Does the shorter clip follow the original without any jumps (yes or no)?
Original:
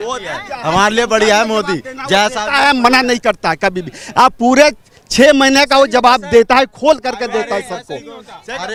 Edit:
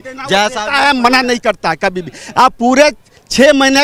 yes